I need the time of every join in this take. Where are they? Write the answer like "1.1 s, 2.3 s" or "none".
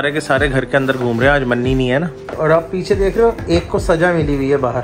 2.3 s